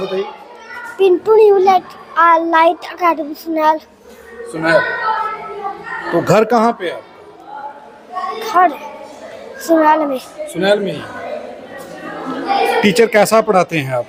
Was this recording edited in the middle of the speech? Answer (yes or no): no